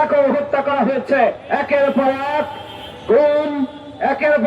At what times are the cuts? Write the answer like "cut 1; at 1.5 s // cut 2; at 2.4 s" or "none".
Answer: cut 1; at 1.4 s

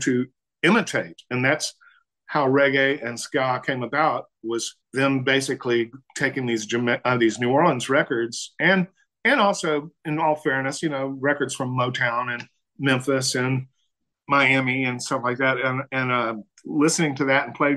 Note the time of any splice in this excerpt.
cut 1; at 4.8 s

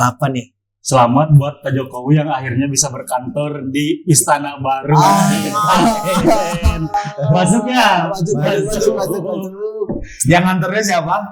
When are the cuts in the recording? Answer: none

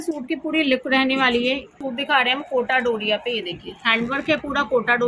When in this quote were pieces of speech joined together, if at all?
cut 1; at 1.8 s

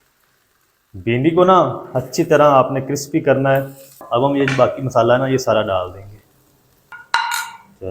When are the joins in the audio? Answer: cut 1; at 3.8 s // cut 2; at 6.9 s

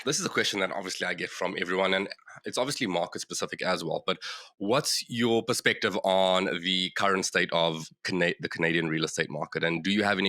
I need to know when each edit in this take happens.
none

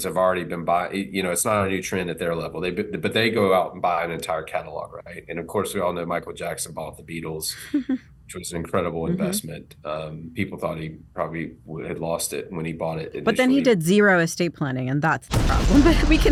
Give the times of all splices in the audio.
none

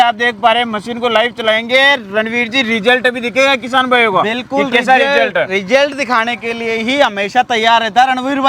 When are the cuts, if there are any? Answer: none

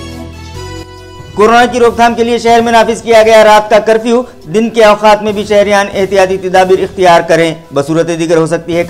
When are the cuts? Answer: cut 1; at 1.3 s

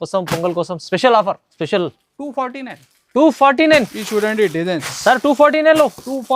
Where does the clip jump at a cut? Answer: cut 1; at 1.5 s

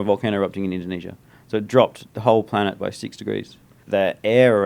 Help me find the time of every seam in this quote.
cut 1; at 3.7 s

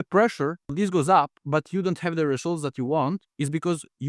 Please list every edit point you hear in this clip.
cut 1; at 0.7 s // cut 2; at 1.4 s

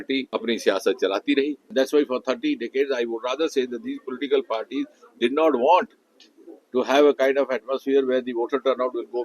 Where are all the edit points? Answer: cut 1; at 1.6 s

